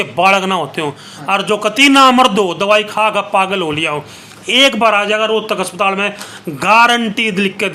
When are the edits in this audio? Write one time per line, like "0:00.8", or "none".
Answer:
none